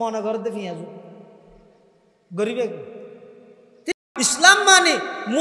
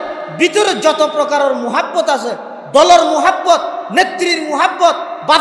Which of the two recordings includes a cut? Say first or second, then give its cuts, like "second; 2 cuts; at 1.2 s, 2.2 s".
first; 1 cut; at 3.9 s